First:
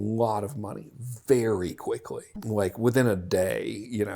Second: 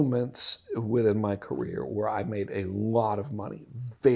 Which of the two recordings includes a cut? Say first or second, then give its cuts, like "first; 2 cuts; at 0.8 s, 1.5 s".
first; 1 cut; at 2.3 s